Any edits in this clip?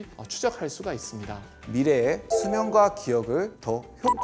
yes; 1 cut; at 1.5 s

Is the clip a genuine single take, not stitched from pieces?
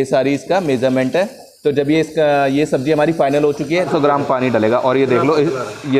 no; 1 cut; at 3.9 s

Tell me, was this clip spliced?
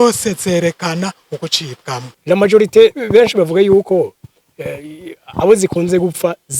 yes; 1 cut; at 2.1 s

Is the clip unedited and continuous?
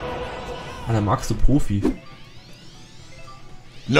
no; 1 cut; at 1.8 s

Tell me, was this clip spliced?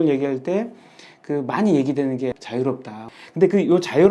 no; 0 cuts

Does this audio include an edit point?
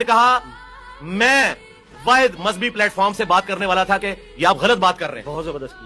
no; 0 cuts

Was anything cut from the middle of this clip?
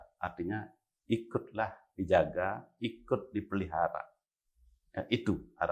no; 0 cuts

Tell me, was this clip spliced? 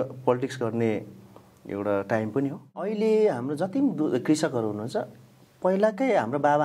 yes; 1 cut; at 2.9 s

